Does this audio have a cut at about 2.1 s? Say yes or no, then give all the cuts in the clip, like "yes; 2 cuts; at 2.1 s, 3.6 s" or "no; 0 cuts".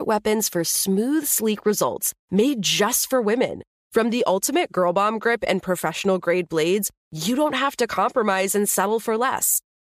no; 0 cuts